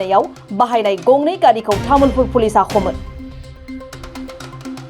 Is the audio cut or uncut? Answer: cut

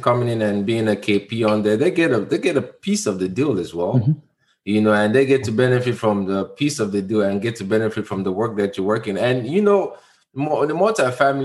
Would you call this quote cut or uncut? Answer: uncut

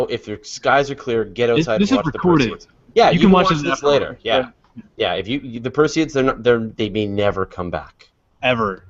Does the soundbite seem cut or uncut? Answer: uncut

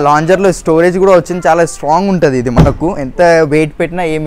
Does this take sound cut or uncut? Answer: uncut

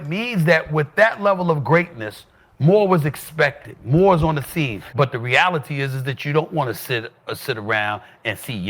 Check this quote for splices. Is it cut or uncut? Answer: cut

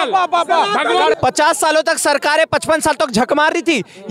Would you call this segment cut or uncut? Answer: cut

